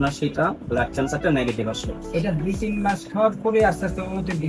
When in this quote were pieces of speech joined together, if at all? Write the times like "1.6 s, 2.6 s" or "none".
none